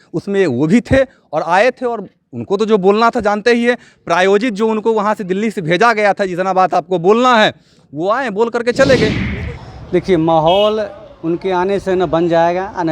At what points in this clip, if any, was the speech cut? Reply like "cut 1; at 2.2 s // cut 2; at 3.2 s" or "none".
cut 1; at 9.2 s